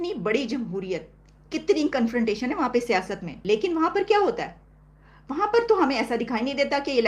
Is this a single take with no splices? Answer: no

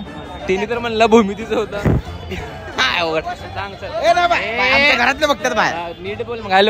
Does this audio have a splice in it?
no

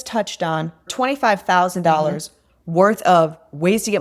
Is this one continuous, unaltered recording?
no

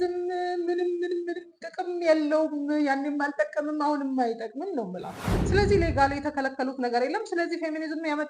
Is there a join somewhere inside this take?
yes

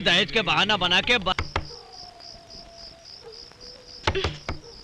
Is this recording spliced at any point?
yes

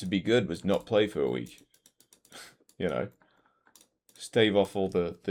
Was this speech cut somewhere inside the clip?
no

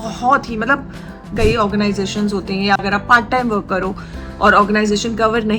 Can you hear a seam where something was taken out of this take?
yes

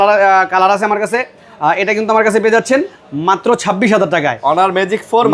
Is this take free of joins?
yes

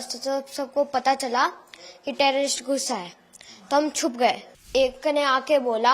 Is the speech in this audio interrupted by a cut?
yes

